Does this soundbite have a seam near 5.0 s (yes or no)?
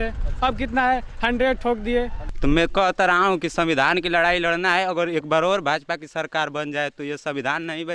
no